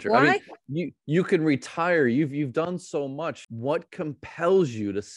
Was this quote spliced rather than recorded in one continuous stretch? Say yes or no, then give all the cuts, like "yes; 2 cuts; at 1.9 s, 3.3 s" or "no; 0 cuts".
yes; 1 cut; at 3.5 s